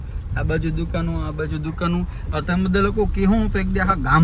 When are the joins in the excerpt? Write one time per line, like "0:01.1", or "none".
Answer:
none